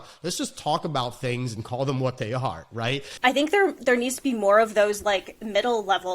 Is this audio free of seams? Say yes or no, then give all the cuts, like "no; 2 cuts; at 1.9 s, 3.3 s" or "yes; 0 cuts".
no; 1 cut; at 3.1 s